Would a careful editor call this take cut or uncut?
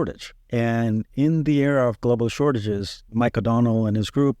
uncut